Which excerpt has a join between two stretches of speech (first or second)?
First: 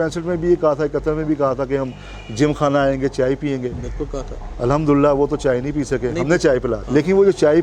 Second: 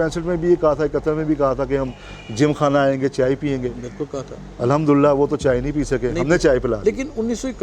first